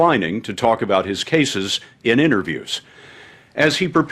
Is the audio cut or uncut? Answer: cut